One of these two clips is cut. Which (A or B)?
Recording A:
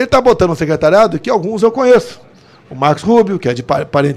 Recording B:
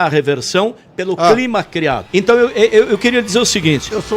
B